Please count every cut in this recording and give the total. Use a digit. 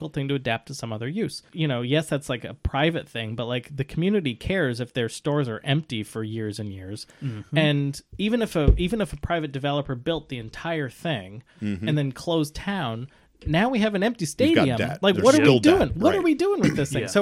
1